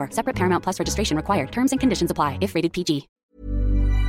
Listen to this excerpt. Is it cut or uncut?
cut